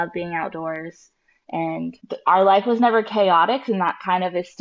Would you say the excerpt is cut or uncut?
cut